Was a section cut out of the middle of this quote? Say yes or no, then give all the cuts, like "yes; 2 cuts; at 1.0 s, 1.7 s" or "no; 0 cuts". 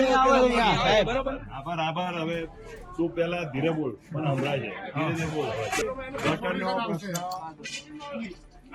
yes; 1 cut; at 5.8 s